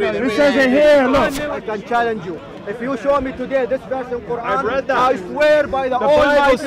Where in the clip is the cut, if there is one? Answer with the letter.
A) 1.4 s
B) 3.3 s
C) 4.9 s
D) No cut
A